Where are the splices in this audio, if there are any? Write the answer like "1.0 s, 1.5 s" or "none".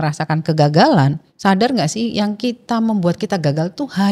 1.3 s